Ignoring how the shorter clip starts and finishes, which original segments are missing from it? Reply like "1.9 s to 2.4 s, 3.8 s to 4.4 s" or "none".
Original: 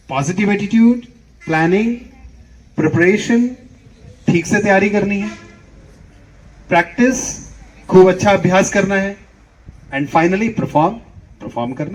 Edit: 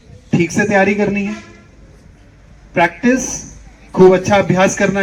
none